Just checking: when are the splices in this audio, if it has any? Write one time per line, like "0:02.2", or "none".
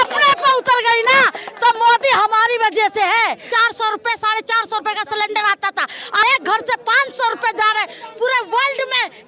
0:03.5
0:06.2